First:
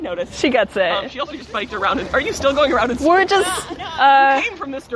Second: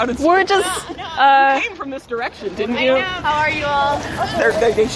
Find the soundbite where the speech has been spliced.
second; 1 cut; at 3.2 s

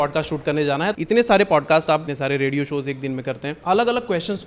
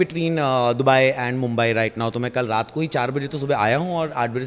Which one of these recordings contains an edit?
first; 3 cuts; at 0.9 s, 2.1 s, 3.5 s

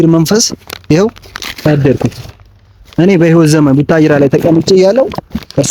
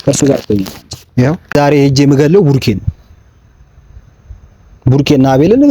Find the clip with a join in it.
second; 1 cut; at 1.5 s

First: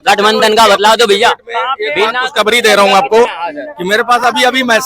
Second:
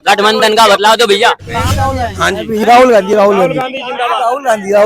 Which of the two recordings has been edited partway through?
second; 1 cut; at 1.7 s

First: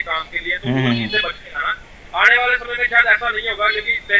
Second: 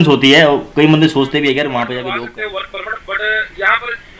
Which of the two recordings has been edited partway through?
second; 1 cut; at 2.0 s

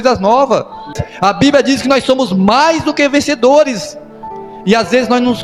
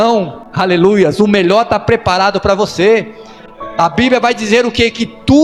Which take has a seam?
first; 1 cut; at 1.0 s

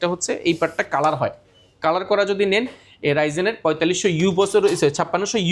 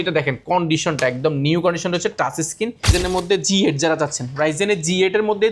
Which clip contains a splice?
second; 1 cut; at 2.9 s

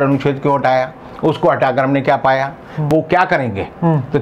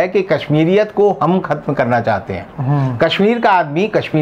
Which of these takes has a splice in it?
first; 1 cut; at 2.9 s

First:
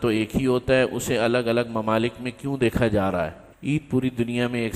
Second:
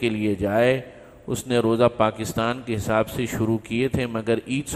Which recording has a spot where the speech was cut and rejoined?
first; 1 cut; at 3.5 s

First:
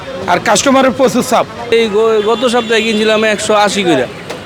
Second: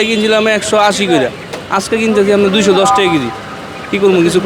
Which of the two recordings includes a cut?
first; 1 cut; at 1.7 s

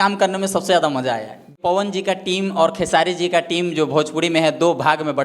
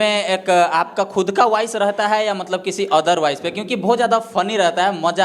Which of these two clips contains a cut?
first; 1 cut; at 1.5 s

